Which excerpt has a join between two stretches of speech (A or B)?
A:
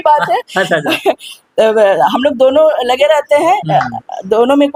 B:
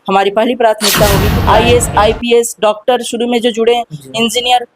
B